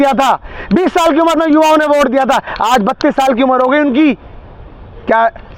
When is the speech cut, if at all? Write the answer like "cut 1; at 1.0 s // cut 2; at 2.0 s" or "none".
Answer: none